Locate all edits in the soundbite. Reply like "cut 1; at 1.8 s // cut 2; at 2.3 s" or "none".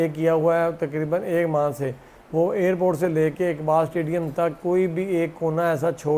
none